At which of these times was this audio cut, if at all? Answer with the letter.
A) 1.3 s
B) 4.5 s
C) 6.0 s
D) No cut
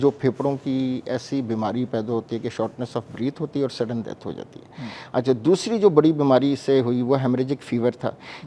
D